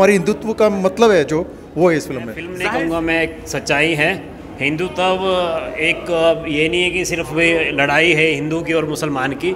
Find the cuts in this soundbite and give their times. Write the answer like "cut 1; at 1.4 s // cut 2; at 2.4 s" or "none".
cut 1; at 2.5 s